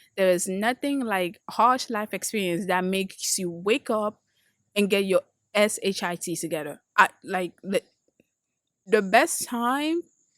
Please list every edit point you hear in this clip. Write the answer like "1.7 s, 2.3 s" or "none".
8.9 s

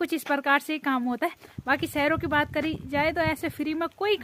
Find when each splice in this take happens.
none

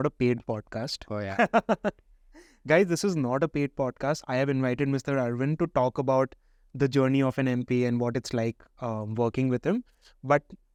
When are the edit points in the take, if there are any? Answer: none

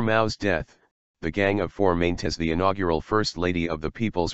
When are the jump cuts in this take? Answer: none

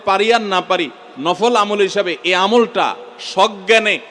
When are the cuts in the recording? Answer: none

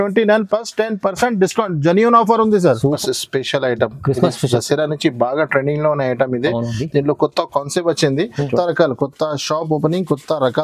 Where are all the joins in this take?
2.9 s, 8.5 s

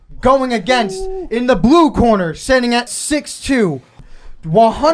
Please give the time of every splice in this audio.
3.0 s, 4.0 s

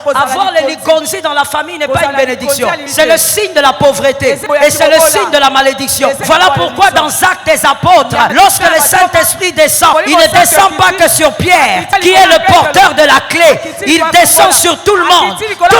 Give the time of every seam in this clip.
2.9 s, 4.4 s, 6.2 s, 8.3 s, 9.9 s, 11.9 s

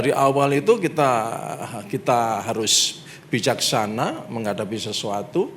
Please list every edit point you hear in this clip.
none

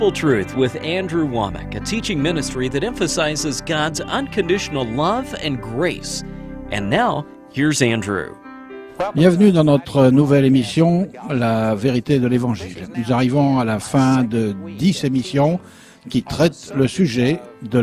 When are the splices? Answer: 15.1 s

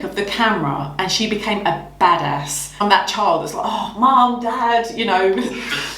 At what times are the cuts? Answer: 2.8 s

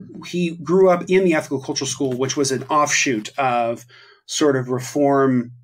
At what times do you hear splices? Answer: none

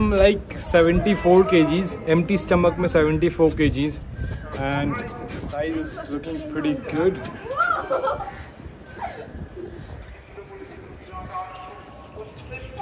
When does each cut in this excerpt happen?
none

